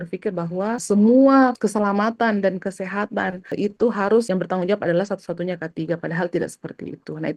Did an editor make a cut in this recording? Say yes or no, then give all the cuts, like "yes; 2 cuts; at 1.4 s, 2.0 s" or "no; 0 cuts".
yes; 4 cuts; at 0.8 s, 1.6 s, 3.5 s, 4.3 s